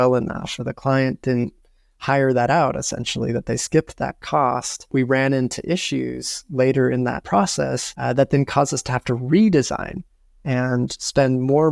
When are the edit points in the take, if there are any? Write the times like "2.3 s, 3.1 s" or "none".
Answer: 7.5 s